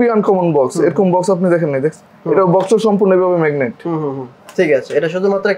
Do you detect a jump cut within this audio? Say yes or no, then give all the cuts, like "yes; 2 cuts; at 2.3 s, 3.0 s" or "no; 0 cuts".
no; 0 cuts